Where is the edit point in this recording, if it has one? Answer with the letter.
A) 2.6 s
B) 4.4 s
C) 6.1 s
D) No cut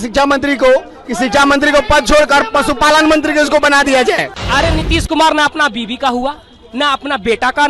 B